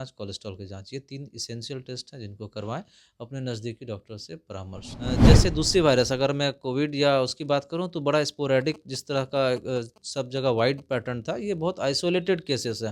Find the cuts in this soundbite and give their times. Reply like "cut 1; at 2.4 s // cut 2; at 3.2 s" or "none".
cut 1; at 5.3 s